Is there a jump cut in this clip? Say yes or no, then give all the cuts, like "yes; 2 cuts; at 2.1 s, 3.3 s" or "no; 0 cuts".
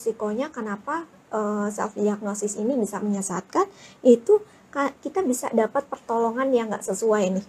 no; 0 cuts